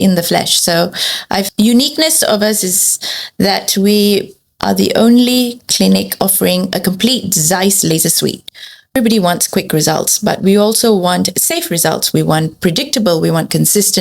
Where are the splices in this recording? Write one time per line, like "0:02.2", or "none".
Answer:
0:01.4
0:08.9